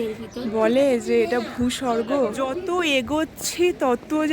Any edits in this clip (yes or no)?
yes